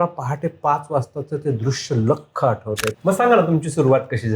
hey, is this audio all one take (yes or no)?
no